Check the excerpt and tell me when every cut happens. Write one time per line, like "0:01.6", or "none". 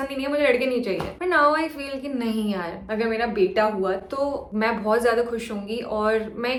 none